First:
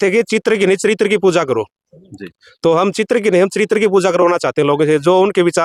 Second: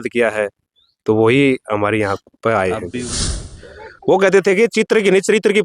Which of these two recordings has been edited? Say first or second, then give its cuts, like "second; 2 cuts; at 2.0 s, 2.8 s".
second; 1 cut; at 3.2 s